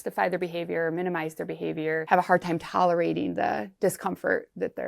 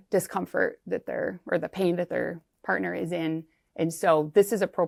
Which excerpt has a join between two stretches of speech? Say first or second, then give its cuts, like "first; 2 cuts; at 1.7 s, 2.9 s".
first; 1 cut; at 2.0 s